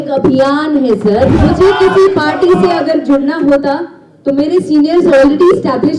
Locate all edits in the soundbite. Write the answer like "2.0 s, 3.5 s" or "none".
1.4 s